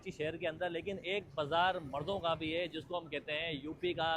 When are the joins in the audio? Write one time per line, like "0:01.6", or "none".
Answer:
none